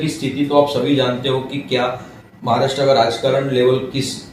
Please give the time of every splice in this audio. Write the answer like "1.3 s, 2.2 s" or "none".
none